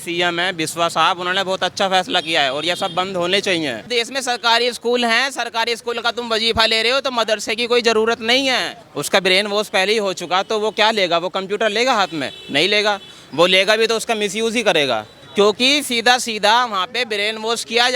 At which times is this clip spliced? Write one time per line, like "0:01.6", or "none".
0:03.9
0:08.7
0:15.2